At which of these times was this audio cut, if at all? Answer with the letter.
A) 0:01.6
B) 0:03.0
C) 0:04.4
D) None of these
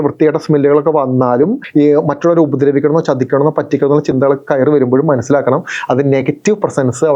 A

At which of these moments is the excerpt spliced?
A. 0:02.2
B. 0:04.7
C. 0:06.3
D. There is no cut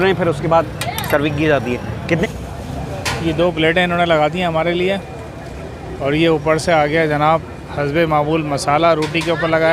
A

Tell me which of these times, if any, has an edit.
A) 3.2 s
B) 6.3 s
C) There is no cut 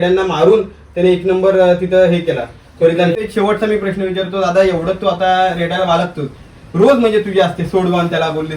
A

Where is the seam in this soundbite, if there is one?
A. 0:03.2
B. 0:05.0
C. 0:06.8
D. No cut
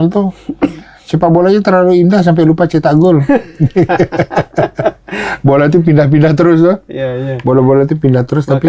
D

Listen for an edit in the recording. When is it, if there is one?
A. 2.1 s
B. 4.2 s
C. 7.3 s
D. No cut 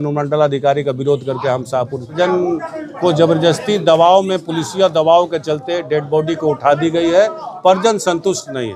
A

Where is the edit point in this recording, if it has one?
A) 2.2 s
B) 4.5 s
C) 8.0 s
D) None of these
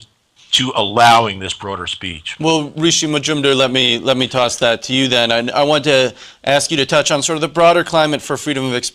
B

